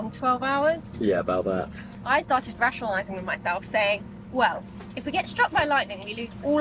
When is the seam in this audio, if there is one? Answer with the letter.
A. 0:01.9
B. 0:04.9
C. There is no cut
A